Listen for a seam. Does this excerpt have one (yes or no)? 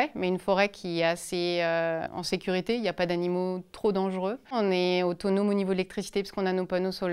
yes